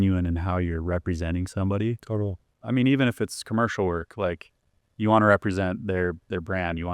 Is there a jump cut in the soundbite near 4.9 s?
no; 1 cut; at 2.6 s

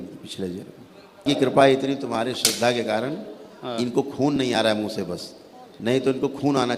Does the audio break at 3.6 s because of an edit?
no; 1 cut; at 1.3 s

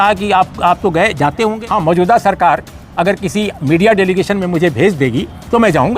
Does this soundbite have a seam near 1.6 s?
yes; 1 cut; at 1.6 s

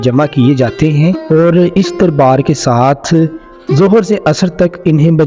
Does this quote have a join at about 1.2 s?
yes; 1 cut; at 1.2 s

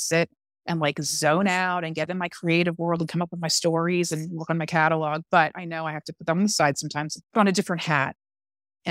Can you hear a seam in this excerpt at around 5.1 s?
no; 1 cut; at 7.1 s

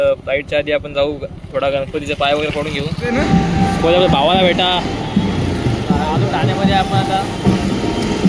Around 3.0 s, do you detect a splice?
yes; 1 cut; at 3.0 s

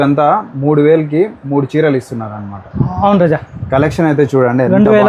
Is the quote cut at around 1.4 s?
no; 0 cuts

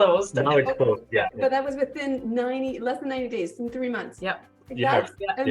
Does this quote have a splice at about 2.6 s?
no; 2 cuts; at 1.3 s, 4.1 s

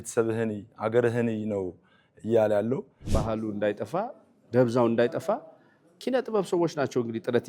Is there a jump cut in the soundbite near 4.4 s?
no; 1 cut; at 3.0 s

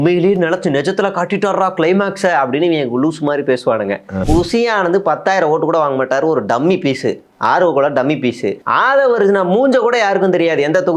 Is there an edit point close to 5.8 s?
no; 2 cuts; at 4.2 s, 8.6 s

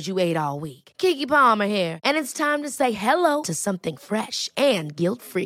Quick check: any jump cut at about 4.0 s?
no; 0 cuts

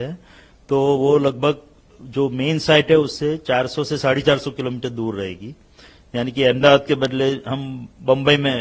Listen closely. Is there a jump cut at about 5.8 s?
no; 0 cuts

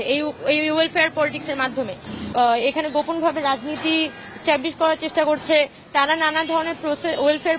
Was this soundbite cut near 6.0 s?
no; 1 cut; at 2.2 s

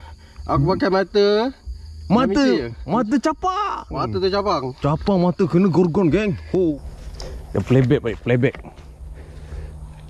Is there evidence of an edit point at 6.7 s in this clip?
yes; 1 cut; at 6.7 s

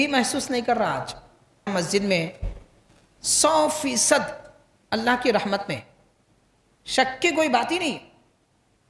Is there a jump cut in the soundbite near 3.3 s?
no; 1 cut; at 1.7 s

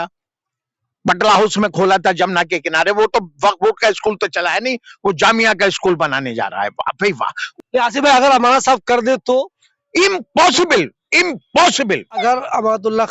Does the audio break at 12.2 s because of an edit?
yes; 2 cuts; at 7.4 s, 12.2 s

